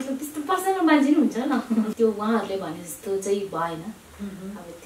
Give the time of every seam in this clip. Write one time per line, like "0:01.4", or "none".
0:01.9